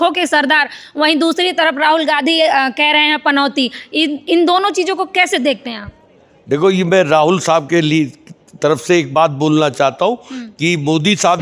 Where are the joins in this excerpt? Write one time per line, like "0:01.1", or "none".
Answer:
none